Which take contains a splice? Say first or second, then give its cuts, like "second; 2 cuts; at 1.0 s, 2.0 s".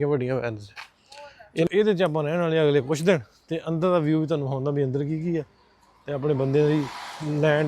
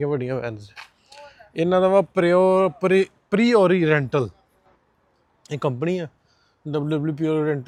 first; 1 cut; at 1.7 s